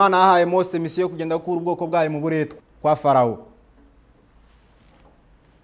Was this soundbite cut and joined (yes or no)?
yes